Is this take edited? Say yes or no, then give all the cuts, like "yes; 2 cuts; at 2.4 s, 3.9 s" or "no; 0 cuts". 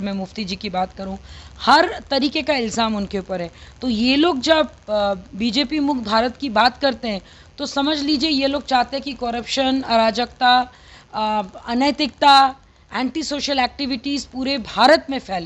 no; 0 cuts